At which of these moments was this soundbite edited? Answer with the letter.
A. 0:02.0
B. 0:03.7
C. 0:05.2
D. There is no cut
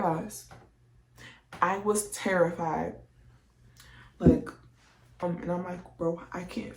C